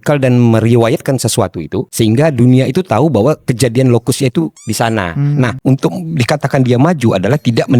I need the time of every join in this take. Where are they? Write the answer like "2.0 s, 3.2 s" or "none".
1.9 s, 5.6 s